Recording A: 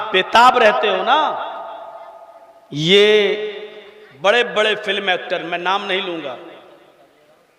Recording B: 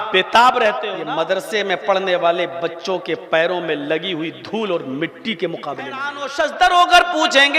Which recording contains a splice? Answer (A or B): B